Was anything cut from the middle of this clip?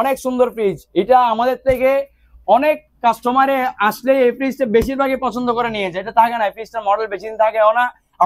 no; 0 cuts

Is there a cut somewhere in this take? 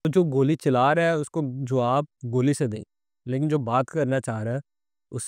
no; 0 cuts

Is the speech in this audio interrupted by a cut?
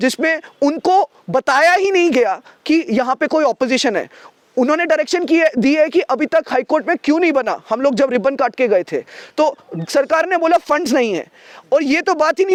no; 0 cuts

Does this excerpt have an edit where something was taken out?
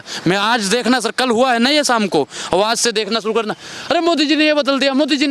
no; 0 cuts

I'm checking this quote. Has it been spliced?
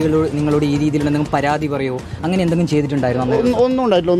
no; 0 cuts

